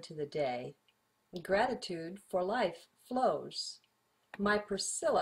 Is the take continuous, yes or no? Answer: no